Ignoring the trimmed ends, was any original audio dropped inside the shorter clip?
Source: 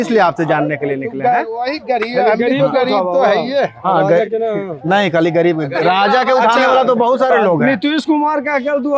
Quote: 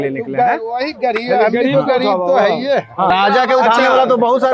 yes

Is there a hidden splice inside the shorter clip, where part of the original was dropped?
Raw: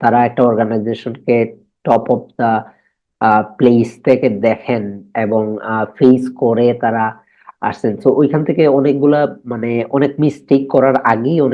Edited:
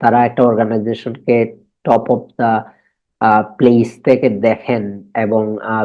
no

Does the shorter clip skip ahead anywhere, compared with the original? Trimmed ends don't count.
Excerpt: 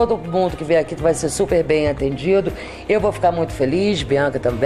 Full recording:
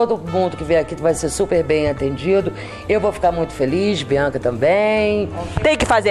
no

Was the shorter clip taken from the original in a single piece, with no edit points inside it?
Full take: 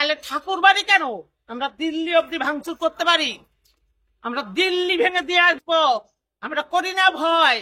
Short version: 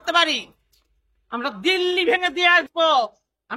yes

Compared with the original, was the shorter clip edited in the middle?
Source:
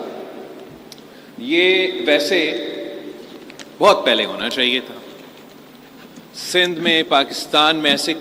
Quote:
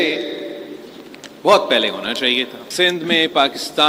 yes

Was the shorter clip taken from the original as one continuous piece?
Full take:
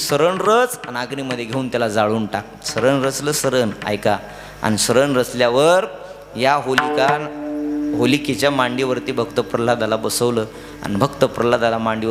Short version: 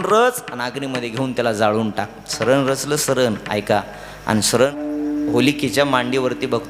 no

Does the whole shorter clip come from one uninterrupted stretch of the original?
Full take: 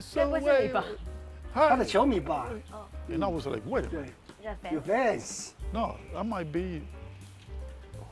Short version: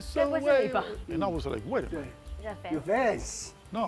no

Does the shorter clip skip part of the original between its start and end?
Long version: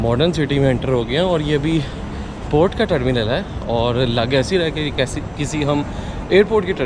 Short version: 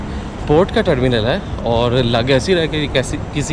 no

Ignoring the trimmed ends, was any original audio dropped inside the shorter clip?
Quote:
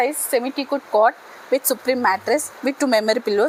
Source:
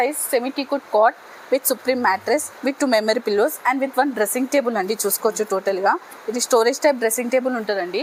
no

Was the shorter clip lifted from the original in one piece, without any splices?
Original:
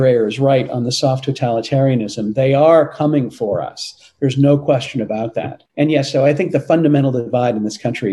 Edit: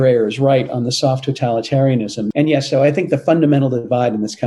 no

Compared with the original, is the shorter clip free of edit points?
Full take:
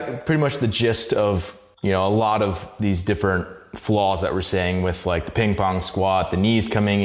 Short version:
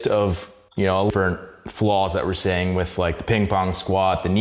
no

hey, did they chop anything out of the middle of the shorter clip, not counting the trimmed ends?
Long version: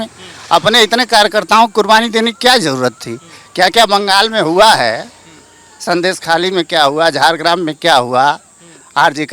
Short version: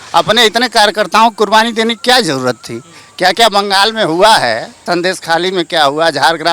yes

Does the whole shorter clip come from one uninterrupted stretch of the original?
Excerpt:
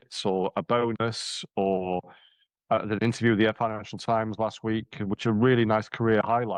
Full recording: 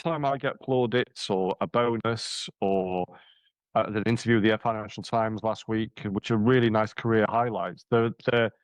yes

